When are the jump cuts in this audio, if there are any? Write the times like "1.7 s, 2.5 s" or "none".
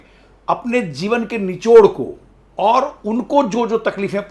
none